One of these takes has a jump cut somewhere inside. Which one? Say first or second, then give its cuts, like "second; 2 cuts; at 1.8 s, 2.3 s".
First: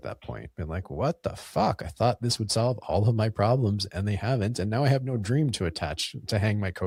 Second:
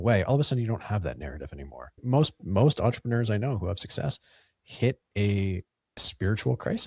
second; 2 cuts; at 2.0 s, 5.9 s